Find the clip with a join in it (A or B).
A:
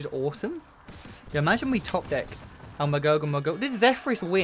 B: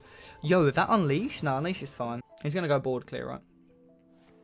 B